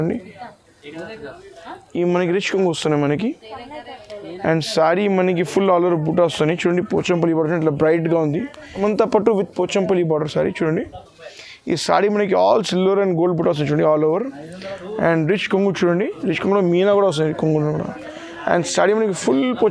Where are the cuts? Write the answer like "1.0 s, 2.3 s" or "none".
8.7 s